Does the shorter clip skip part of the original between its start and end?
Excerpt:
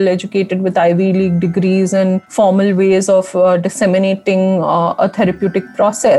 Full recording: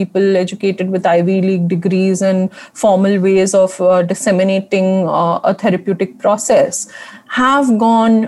yes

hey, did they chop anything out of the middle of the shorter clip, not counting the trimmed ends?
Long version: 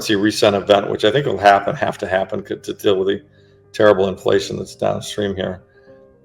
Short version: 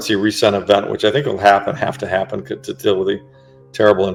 no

